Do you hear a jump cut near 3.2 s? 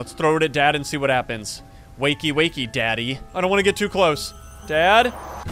yes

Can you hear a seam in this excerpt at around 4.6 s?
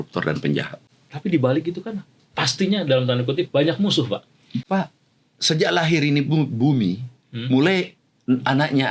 yes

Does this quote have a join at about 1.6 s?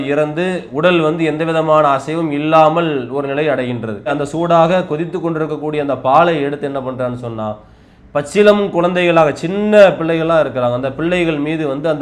no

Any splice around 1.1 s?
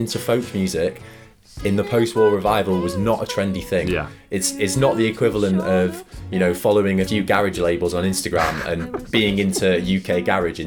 no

